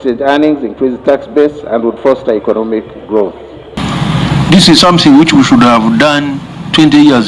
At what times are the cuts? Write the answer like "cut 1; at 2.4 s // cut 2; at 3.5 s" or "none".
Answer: cut 1; at 3.8 s

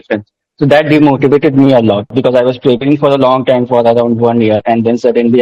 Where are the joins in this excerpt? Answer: cut 1; at 2.1 s

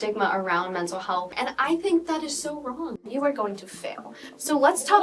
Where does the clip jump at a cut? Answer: cut 1; at 1.3 s // cut 2; at 3.0 s

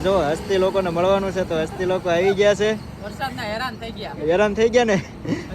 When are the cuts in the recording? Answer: none

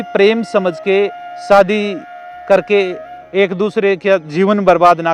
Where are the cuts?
none

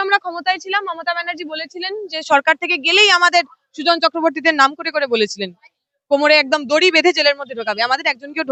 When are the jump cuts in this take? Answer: none

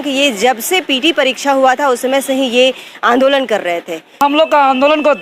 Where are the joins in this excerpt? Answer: cut 1; at 4.2 s

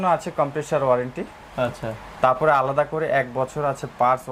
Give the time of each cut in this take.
none

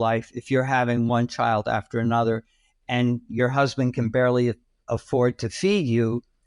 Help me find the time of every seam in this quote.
cut 1; at 4.7 s

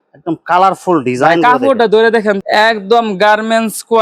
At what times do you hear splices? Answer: cut 1; at 2.4 s

